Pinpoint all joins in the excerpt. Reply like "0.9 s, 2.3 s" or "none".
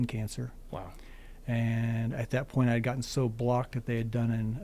none